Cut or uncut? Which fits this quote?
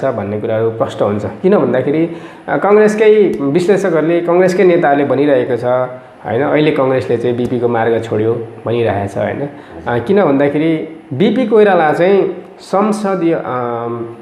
uncut